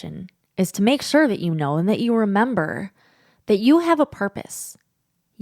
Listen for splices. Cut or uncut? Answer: uncut